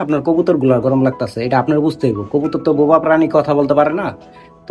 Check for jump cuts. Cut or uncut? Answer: uncut